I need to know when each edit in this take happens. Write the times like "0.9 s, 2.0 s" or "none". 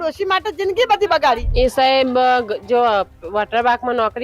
1.5 s

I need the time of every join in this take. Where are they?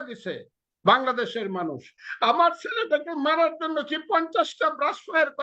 2.0 s

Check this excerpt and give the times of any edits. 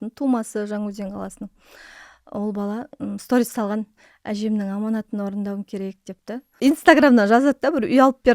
6.6 s

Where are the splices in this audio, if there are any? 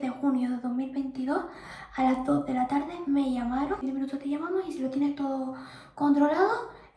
3.8 s

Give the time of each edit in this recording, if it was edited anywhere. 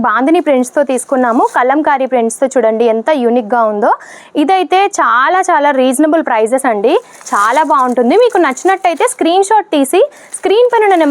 none

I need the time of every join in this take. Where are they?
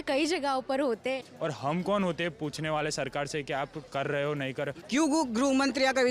1.3 s, 4.7 s

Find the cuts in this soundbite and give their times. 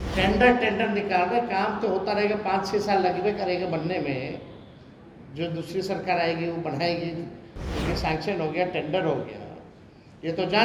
none

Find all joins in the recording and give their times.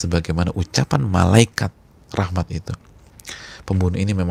none

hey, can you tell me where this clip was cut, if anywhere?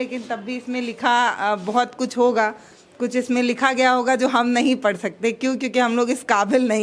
none

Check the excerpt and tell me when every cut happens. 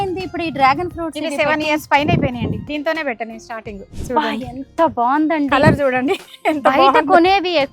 2.6 s, 3.9 s

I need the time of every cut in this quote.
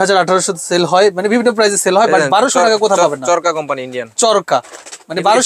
none

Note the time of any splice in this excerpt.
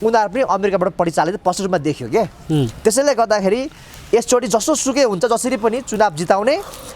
none

